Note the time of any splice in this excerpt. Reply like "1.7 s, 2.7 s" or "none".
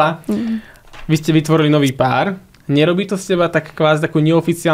none